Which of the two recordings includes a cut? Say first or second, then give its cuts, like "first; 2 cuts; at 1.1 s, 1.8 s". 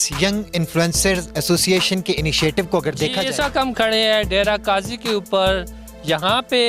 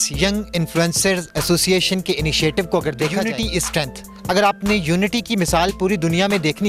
first; 1 cut; at 3.2 s